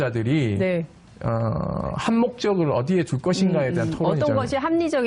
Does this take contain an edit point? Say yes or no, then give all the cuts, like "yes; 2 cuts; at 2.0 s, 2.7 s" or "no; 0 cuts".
yes; 1 cut; at 1.9 s